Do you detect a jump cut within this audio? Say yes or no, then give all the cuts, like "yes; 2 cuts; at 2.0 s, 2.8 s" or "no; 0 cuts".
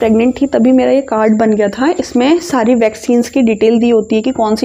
no; 0 cuts